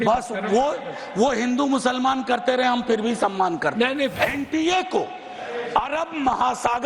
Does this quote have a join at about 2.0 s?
no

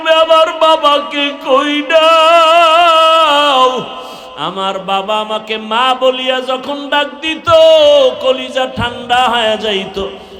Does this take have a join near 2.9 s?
no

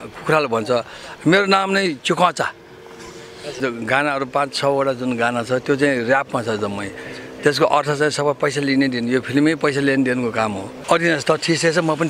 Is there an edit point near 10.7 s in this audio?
yes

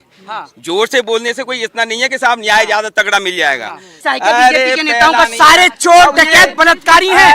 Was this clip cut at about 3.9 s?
yes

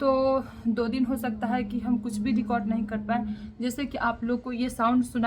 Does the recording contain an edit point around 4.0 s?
no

